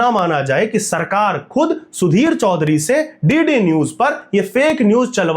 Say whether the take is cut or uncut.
uncut